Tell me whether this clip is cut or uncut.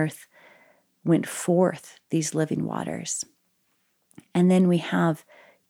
uncut